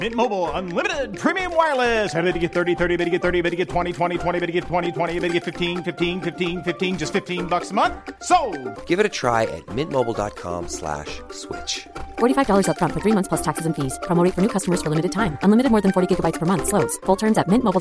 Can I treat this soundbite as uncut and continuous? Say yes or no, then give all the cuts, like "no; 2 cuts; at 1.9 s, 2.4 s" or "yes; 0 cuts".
yes; 0 cuts